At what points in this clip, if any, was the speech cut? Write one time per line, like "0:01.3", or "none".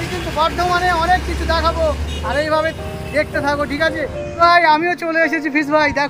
0:04.2